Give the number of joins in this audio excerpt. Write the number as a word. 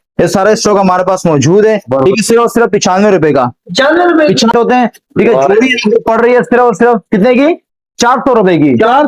one